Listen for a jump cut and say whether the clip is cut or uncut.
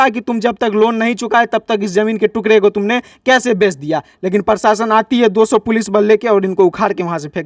uncut